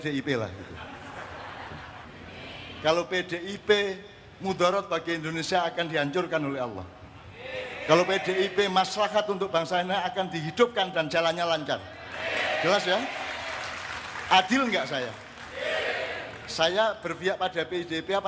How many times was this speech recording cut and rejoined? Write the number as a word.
one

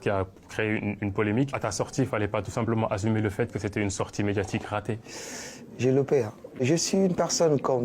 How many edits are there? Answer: three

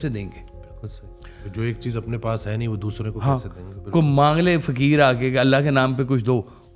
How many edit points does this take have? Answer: zero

